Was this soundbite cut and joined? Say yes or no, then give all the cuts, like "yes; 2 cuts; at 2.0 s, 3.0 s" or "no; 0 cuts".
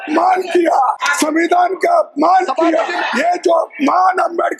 yes; 2 cuts; at 1.0 s, 3.0 s